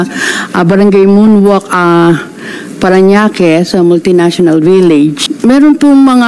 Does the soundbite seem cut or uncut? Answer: cut